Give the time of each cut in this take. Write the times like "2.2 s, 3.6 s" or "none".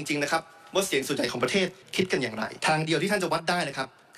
2.0 s